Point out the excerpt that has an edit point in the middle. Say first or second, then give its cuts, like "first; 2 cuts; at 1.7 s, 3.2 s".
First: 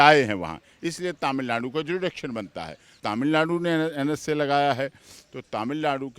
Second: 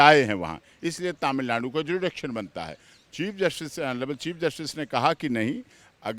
first; 1 cut; at 2.8 s